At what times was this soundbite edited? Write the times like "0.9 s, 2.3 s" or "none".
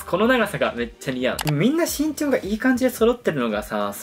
1.4 s